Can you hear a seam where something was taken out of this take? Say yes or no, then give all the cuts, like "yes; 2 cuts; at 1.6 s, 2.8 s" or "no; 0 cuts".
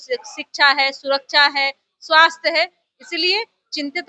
no; 0 cuts